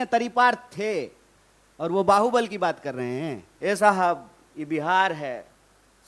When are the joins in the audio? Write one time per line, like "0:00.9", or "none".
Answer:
0:03.4